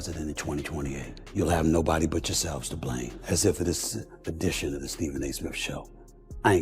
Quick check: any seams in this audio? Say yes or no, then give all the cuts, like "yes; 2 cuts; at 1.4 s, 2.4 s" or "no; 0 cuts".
yes; 2 cuts; at 1.1 s, 3.1 s